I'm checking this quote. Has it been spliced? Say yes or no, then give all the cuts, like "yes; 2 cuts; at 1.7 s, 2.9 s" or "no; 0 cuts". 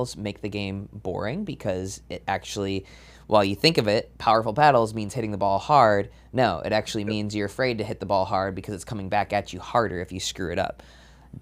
no; 0 cuts